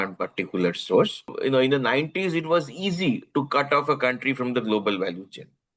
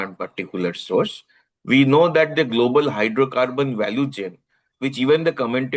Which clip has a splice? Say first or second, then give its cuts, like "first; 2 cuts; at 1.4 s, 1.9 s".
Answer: first; 1 cut; at 1.3 s